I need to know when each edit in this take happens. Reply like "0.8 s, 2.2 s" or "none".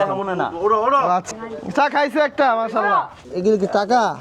1.3 s, 3.2 s